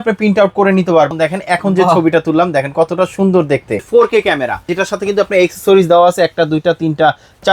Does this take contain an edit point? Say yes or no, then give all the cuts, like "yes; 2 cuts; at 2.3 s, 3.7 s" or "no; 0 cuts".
yes; 3 cuts; at 1.1 s, 3.9 s, 4.7 s